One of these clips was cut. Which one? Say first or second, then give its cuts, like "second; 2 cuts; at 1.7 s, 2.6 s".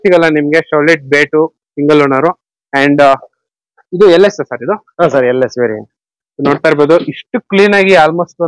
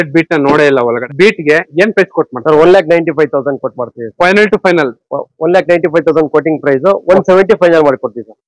second; 1 cut; at 1.0 s